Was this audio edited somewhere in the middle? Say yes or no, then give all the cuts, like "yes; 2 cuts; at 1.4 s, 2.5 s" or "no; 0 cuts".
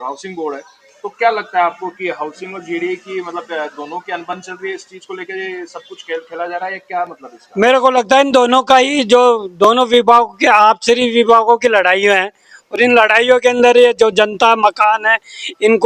no; 0 cuts